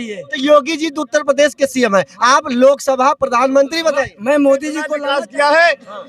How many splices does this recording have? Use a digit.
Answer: 1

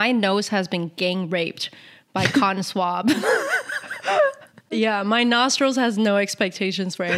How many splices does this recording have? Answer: 1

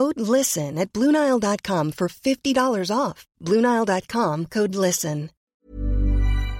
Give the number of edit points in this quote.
1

